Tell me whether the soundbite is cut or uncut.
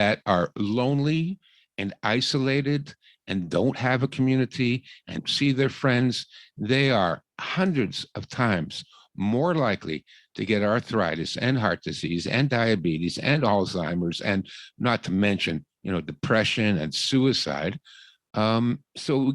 cut